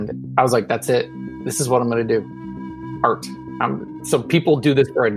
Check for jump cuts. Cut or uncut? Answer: uncut